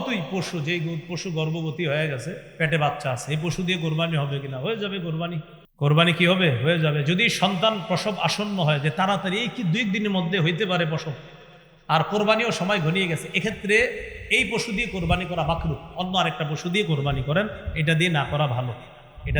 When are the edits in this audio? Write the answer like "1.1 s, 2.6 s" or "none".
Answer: 5.6 s